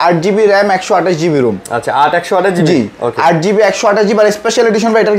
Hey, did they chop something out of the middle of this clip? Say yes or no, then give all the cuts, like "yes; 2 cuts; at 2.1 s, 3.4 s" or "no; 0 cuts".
no; 0 cuts